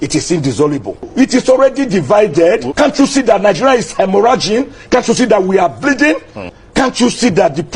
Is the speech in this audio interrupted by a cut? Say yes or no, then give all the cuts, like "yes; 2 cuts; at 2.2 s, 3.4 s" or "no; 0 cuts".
yes; 3 cuts; at 1.1 s, 2.7 s, 6.5 s